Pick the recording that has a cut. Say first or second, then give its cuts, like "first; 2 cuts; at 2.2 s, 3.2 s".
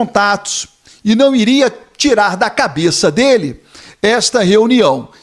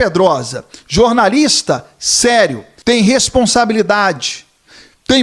second; 1 cut; at 2.7 s